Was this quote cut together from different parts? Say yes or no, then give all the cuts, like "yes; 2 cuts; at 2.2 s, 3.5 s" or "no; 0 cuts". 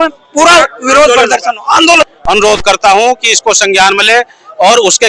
yes; 1 cut; at 2.1 s